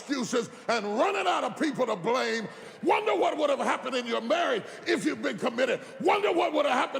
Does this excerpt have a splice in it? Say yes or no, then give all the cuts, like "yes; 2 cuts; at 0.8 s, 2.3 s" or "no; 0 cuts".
yes; 1 cut; at 2.7 s